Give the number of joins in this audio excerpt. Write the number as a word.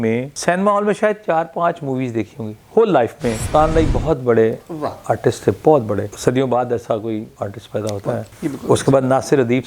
two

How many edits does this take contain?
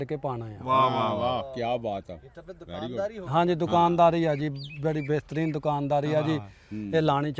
zero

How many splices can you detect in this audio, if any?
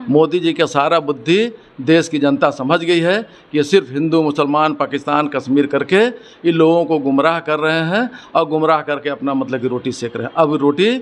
zero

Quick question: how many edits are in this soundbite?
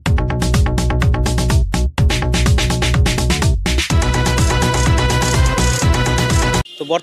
zero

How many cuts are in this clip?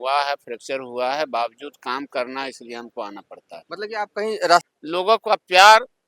one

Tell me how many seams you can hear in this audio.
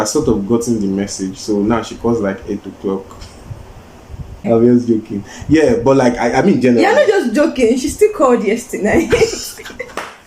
one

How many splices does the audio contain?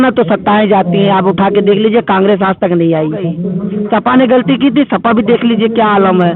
one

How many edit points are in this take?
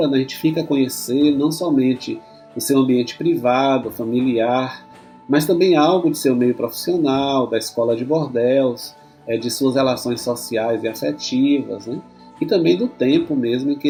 zero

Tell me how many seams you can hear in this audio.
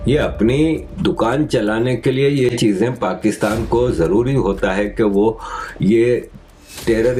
zero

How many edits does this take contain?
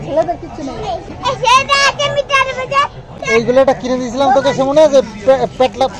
two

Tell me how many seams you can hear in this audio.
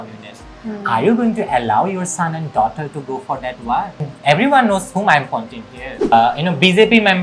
two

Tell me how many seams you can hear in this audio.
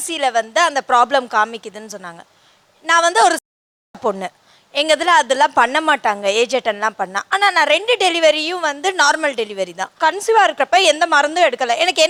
zero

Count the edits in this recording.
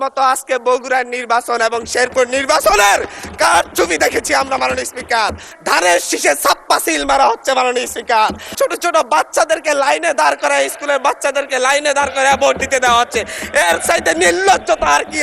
two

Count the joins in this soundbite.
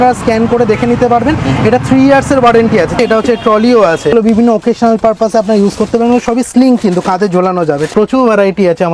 three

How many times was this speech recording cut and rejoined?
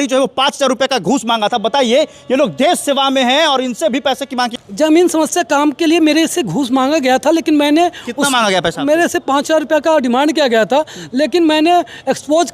one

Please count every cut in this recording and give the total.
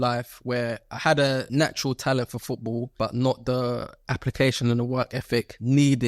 two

